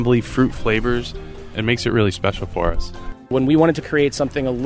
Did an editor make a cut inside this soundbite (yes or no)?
yes